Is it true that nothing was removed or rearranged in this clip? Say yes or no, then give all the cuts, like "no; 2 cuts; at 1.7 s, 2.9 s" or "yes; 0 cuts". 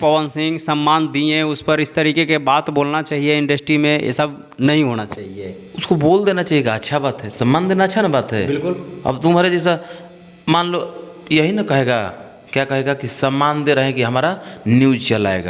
yes; 0 cuts